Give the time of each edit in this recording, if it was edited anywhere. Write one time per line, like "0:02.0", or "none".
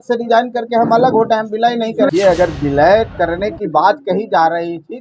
0:02.1